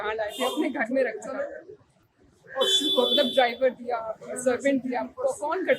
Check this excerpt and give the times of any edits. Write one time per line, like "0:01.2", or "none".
none